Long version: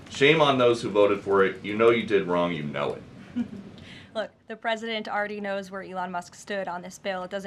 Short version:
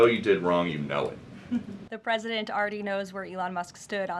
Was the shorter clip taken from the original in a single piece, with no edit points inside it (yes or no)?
no